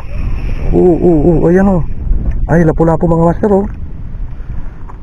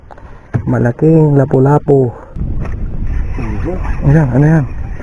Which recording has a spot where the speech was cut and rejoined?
second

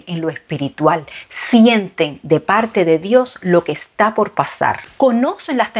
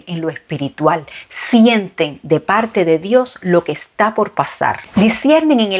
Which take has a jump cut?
first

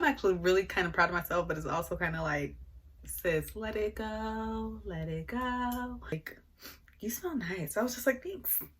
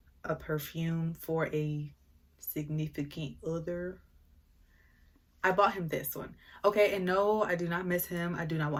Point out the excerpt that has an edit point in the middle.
first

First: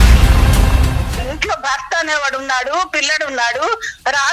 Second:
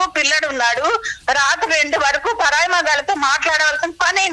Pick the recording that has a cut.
first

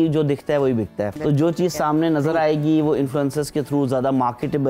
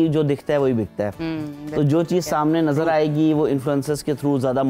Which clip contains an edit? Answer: first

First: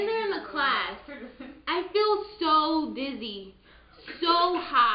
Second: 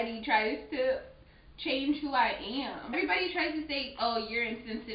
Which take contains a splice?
second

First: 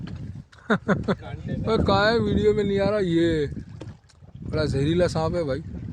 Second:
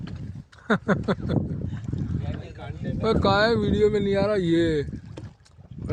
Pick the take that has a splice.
first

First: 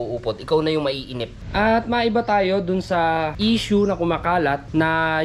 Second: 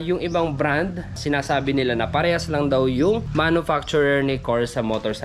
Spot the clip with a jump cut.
first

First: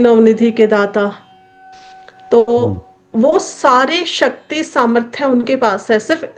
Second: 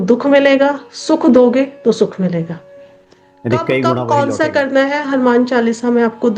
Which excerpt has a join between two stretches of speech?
second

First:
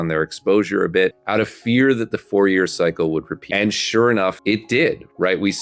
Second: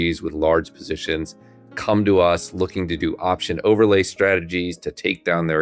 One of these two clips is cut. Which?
first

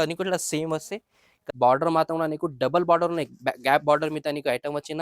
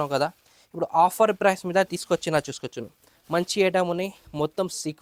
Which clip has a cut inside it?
first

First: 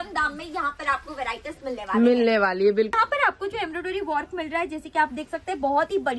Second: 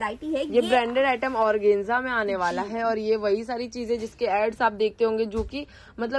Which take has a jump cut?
first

